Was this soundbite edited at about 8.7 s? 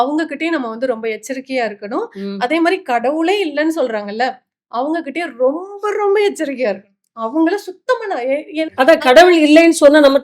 yes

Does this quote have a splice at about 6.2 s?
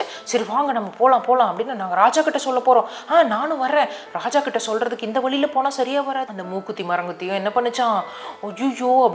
yes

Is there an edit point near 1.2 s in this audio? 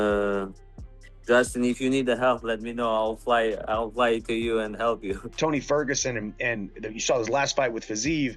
no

